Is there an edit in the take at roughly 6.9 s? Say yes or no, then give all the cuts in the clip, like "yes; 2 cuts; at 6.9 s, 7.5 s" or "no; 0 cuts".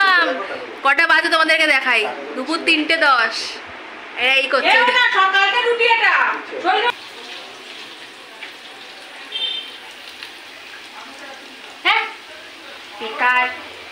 yes; 1 cut; at 6.9 s